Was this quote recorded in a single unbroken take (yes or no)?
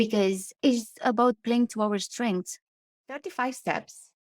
no